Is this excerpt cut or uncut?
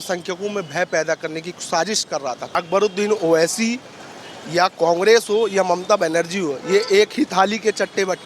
cut